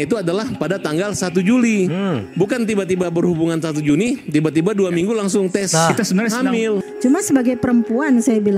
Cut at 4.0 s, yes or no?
no